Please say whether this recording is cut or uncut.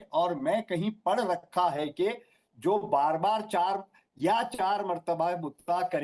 uncut